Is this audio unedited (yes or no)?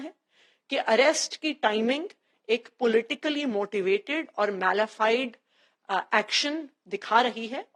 yes